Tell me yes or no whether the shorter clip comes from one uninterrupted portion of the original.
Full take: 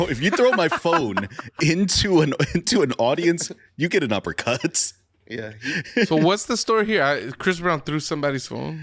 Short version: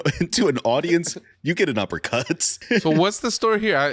no